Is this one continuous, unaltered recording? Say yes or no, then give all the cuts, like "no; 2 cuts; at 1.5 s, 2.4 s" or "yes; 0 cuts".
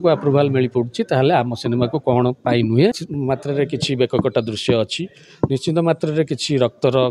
no; 1 cut; at 3.1 s